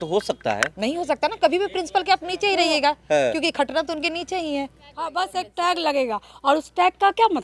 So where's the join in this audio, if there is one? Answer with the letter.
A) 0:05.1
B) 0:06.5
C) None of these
A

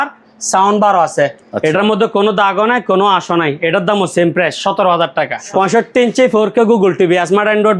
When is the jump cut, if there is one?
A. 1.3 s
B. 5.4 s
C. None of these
B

